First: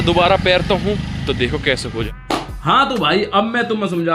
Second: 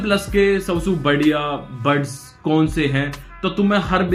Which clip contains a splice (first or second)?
first